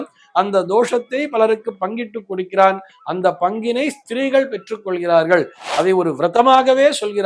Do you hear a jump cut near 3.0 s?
no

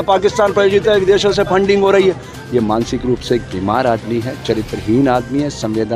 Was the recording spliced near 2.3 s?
yes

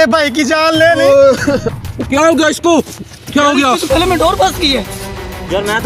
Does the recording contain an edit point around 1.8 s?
yes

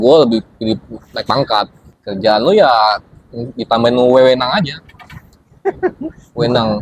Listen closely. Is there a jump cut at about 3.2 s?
no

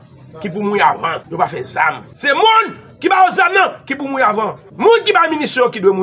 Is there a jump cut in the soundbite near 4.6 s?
yes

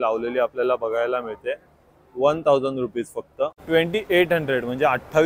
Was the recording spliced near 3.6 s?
yes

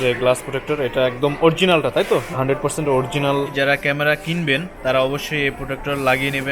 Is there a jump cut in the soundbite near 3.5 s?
yes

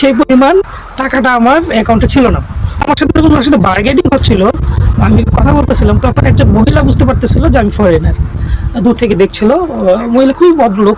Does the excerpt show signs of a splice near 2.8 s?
yes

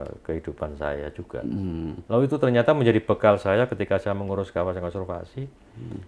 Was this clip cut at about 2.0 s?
yes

